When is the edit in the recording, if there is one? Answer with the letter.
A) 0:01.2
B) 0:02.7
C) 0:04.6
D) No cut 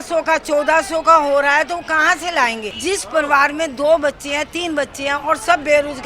B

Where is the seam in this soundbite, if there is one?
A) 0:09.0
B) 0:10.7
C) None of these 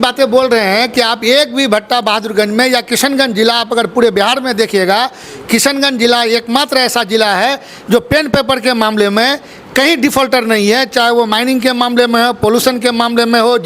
C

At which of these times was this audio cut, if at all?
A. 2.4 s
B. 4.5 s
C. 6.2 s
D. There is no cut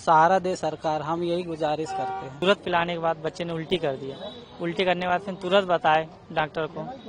A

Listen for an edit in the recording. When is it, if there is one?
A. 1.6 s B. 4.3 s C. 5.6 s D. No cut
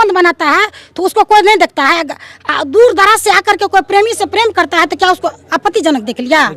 D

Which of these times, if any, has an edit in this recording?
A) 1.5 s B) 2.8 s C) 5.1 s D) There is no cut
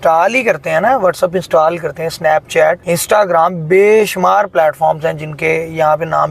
B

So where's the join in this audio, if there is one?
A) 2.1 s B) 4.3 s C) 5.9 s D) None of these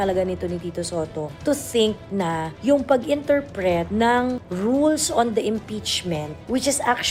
D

